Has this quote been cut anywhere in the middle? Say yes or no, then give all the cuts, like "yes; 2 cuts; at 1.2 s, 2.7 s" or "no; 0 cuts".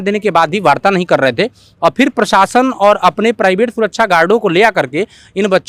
no; 0 cuts